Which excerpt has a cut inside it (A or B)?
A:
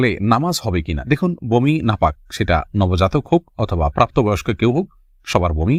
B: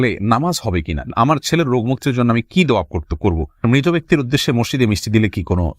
B